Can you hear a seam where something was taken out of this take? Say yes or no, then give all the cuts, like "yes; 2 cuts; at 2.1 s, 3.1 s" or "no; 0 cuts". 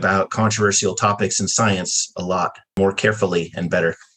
yes; 1 cut; at 2.7 s